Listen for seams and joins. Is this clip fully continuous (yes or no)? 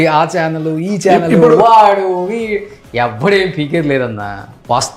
yes